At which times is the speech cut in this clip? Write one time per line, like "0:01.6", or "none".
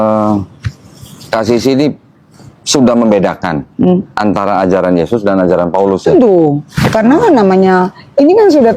none